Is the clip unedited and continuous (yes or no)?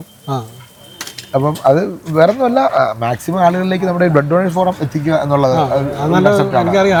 yes